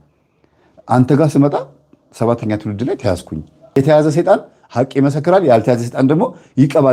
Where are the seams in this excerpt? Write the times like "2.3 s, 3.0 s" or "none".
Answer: 3.8 s